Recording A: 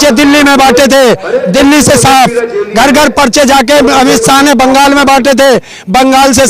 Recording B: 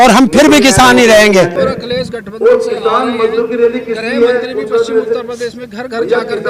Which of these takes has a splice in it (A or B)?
B